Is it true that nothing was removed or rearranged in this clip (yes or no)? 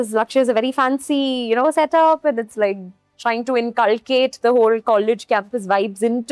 yes